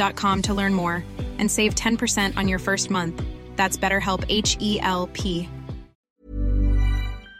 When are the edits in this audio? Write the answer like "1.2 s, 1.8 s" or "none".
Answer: 6.2 s